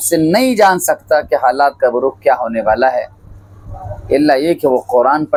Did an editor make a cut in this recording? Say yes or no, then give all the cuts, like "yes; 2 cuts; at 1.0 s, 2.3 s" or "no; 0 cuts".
no; 0 cuts